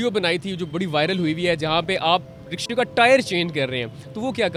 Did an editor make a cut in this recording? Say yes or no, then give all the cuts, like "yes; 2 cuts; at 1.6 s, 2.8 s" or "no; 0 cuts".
no; 0 cuts